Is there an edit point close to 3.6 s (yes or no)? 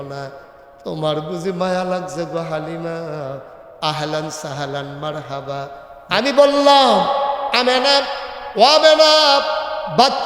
no